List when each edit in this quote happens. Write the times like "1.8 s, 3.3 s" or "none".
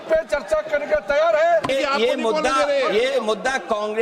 1.7 s